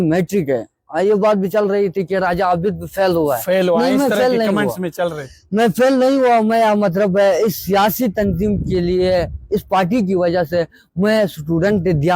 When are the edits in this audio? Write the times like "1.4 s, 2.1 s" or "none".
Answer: none